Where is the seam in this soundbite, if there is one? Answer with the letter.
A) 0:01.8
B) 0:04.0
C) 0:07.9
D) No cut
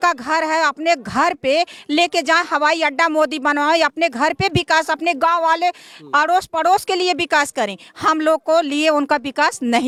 D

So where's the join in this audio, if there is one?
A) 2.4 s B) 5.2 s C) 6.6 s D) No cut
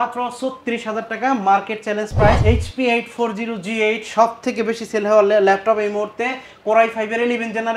A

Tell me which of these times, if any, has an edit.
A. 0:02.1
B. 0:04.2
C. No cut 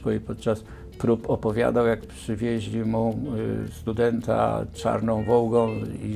A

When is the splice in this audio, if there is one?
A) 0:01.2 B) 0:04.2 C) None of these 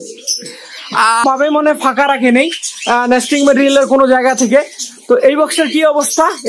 A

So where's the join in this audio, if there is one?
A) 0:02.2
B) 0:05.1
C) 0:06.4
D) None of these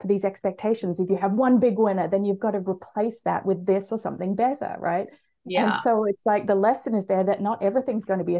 C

